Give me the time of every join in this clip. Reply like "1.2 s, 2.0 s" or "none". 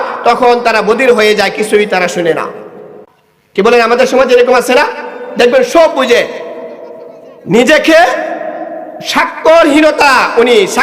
3.0 s